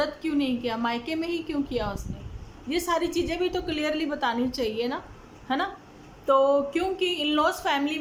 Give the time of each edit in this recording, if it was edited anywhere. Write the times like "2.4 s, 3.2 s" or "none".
none

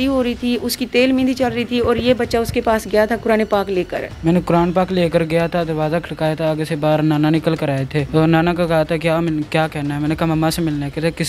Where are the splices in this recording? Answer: 4.1 s, 8.0 s

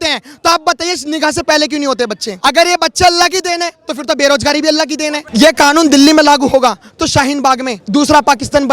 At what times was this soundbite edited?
2.3 s, 5.2 s, 7.8 s

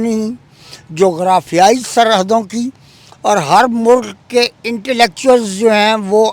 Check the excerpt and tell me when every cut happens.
none

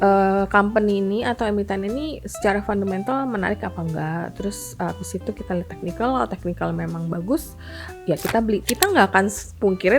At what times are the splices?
8.6 s

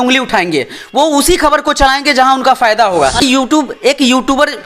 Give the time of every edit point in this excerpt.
3.2 s

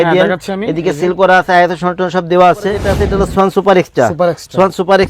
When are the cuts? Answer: 3.0 s

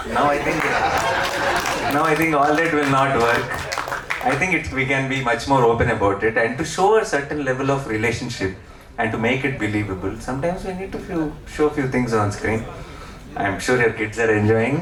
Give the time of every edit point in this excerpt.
none

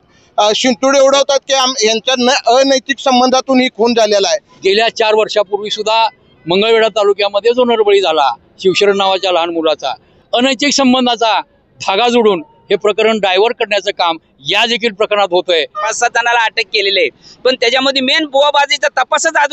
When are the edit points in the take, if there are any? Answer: 4.5 s, 10.1 s, 15.8 s

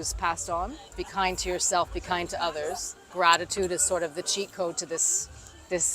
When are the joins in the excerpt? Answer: 1.0 s, 3.1 s

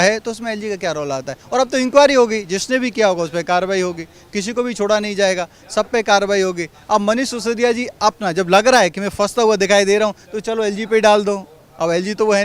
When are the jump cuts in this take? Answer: none

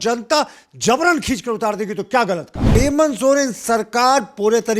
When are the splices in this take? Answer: 2.7 s

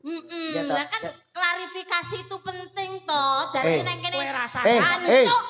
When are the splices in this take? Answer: none

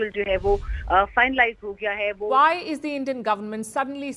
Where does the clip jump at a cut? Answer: 2.3 s

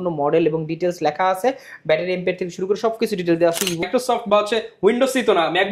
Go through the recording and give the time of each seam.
3.9 s

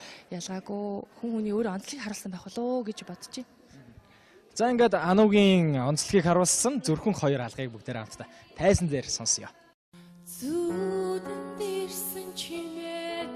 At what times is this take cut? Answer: none

